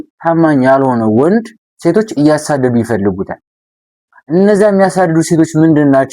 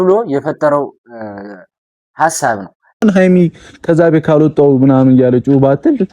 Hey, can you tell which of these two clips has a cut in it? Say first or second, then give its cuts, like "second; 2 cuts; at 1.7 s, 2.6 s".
second; 1 cut; at 3.0 s